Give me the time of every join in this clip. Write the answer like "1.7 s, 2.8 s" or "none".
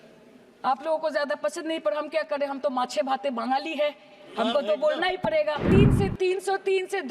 5.7 s